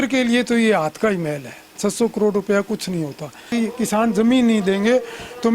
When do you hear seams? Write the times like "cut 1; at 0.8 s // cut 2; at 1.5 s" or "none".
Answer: cut 1; at 3.5 s